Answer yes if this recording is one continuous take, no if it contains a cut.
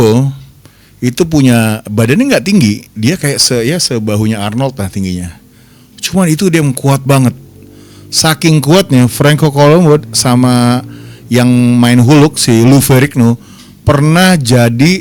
yes